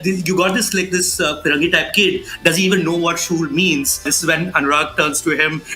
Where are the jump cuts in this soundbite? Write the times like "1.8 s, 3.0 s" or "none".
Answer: 4.1 s